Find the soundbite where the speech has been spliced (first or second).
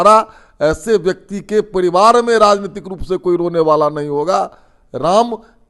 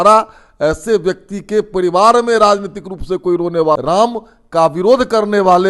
second